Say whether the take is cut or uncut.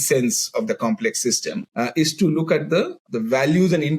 cut